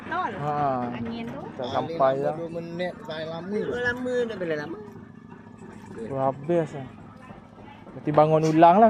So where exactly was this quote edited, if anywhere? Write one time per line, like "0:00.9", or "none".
none